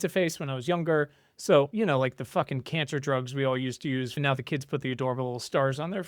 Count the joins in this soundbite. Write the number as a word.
two